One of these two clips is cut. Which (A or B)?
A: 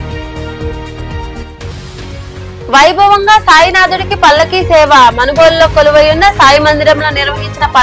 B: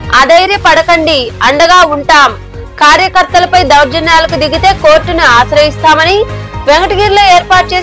A